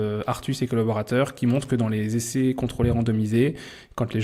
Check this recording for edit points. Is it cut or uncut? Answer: uncut